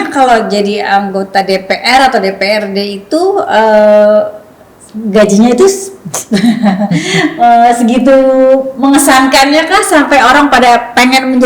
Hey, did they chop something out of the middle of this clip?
no; 0 cuts

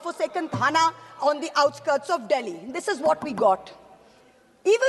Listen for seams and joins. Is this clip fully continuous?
yes; 0 cuts

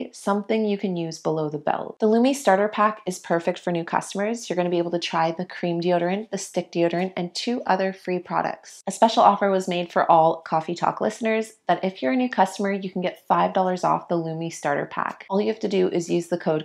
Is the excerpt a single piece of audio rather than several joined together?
no; 2 cuts; at 1.9 s, 8.8 s

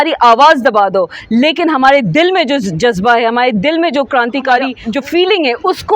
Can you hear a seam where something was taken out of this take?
yes; 1 cut; at 4.8 s

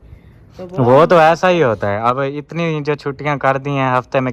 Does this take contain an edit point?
no; 0 cuts

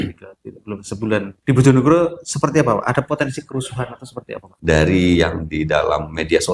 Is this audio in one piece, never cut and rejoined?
no; 2 cuts; at 1.3 s, 4.4 s

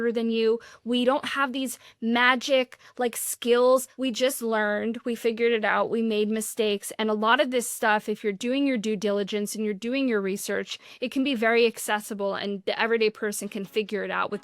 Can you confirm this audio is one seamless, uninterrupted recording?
no; 1 cut; at 3.9 s

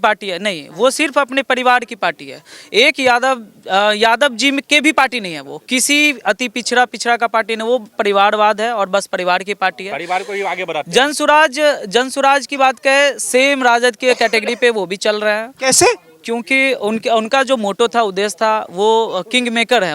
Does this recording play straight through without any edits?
yes; 0 cuts

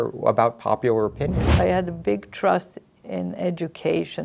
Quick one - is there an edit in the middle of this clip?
yes; 1 cut; at 1.4 s

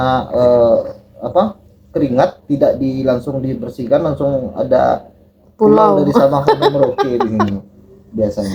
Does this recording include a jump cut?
no; 0 cuts

